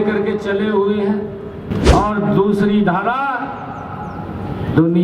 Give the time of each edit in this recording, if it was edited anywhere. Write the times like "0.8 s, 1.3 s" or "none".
1.7 s